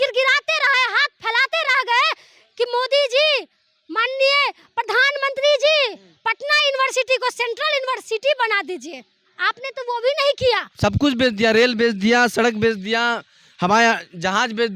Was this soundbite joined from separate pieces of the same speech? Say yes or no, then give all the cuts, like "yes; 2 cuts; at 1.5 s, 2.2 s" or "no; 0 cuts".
yes; 1 cut; at 10.7 s